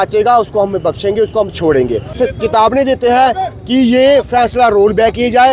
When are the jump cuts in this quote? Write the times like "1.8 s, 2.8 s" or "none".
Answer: 2.2 s